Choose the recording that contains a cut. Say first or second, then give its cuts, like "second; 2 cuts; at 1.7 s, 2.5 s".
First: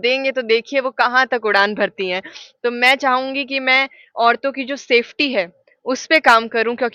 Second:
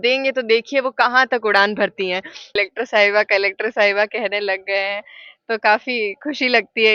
second; 1 cut; at 2.6 s